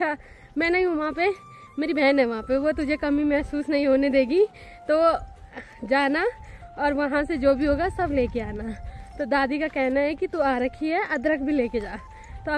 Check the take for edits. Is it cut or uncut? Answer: uncut